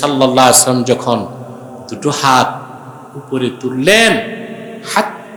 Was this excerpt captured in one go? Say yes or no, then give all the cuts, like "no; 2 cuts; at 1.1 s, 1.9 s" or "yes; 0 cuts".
yes; 0 cuts